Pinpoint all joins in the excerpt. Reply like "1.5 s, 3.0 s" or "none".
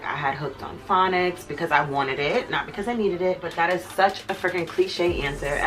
3.5 s